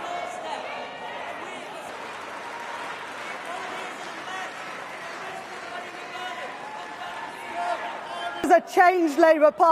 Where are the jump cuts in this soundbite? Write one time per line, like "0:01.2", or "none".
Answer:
0:01.9
0:08.4